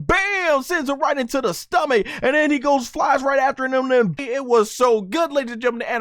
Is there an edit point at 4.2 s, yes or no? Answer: yes